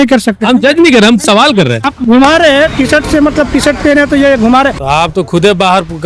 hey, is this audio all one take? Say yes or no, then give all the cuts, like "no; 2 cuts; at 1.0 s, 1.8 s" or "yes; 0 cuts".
no; 1 cut; at 4.8 s